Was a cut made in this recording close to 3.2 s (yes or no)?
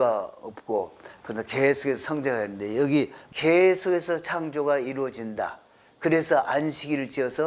yes